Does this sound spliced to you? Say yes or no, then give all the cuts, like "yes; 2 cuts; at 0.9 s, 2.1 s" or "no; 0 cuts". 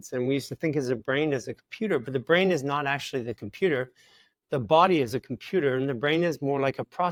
no; 0 cuts